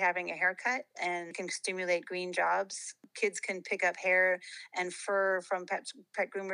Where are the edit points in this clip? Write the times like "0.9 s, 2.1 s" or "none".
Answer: 1.4 s, 3.0 s